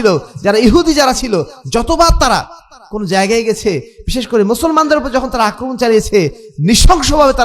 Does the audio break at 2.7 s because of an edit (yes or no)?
no